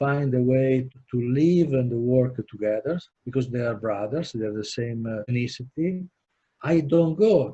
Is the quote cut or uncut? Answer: cut